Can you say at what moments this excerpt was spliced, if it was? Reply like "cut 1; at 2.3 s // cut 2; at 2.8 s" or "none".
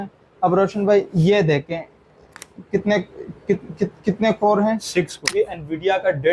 cut 1; at 5.3 s